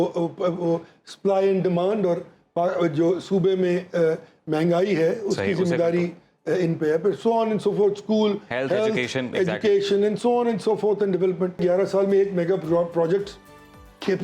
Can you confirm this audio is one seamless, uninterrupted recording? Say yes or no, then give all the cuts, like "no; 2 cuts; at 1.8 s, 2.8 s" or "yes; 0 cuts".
no; 1 cut; at 11.6 s